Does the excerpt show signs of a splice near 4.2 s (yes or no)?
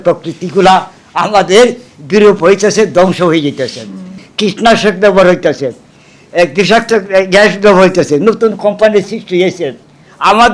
yes